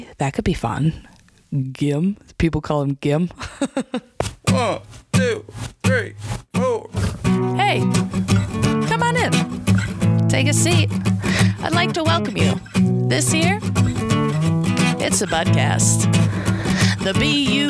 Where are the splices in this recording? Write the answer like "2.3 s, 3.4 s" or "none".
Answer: 4.1 s

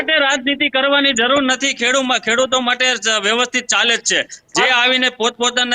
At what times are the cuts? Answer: none

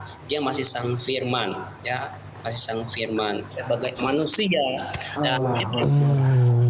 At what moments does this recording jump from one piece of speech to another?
3.6 s

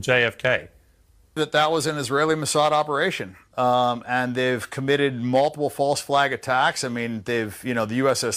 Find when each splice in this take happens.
1.4 s

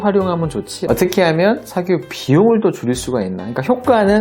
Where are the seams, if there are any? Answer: none

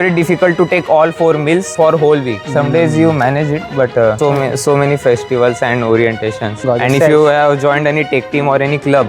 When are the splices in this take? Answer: none

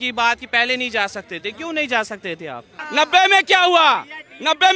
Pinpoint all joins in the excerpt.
2.8 s

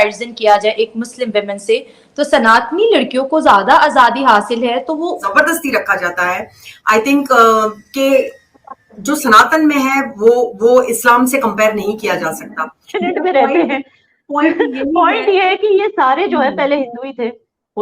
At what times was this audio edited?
5.2 s, 12.9 s

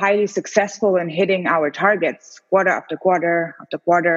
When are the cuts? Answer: none

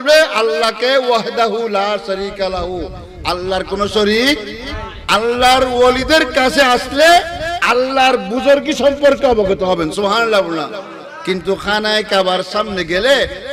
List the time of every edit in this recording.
none

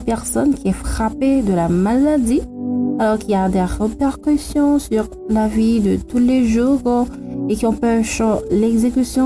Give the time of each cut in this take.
none

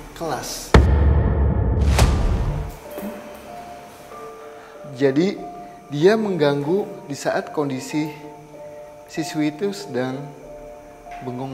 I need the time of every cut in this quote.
2.5 s

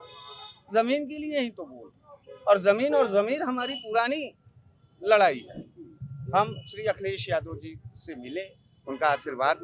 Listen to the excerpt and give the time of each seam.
none

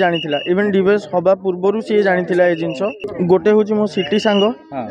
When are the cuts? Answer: 3.1 s

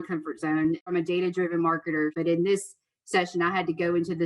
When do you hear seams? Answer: 0.9 s, 2.1 s

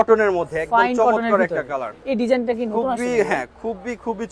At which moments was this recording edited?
1.9 s

